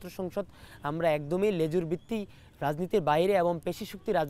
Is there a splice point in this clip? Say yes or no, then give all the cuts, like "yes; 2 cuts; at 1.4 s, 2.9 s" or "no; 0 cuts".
no; 0 cuts